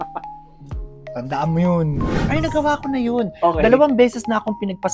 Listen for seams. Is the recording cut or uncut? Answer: cut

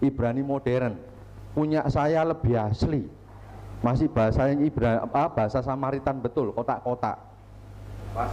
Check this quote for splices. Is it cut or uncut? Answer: uncut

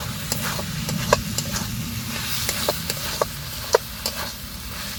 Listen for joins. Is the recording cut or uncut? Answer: uncut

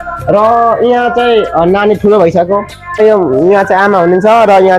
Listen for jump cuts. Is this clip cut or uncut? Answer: cut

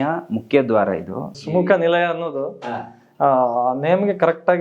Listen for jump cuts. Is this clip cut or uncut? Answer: cut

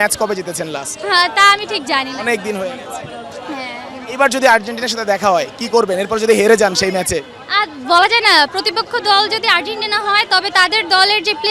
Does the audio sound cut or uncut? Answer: uncut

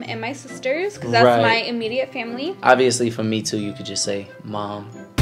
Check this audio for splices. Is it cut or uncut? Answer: uncut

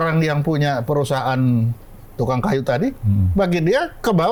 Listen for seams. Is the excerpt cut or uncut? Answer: uncut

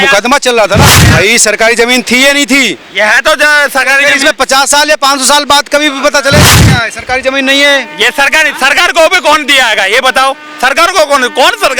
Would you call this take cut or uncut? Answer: cut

